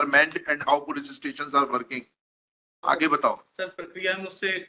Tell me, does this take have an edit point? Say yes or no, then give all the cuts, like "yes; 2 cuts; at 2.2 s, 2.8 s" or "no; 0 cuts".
no; 0 cuts